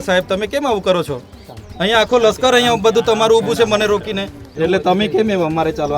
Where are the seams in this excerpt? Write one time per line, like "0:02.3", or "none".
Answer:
0:04.4

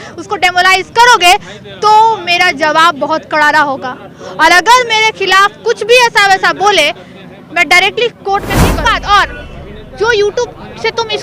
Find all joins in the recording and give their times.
0:08.9

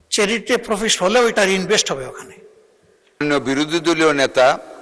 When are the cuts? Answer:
0:03.2

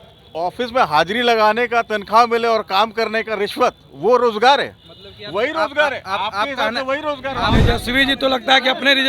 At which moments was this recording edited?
0:07.5

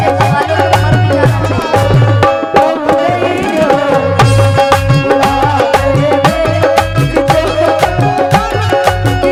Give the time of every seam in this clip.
none

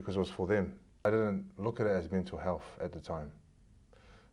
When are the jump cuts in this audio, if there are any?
0:01.0

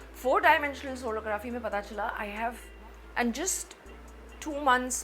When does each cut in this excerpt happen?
0:02.7

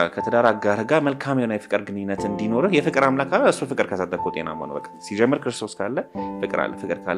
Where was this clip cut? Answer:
none

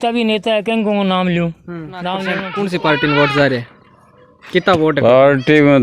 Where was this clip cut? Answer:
0:02.4

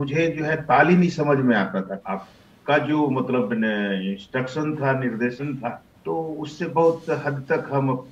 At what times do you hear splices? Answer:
0:02.0
0:05.9

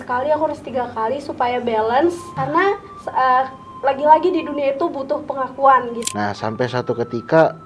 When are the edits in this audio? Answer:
0:02.3
0:03.6
0:06.0

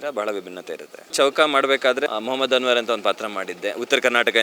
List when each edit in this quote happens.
0:01.1
0:02.1

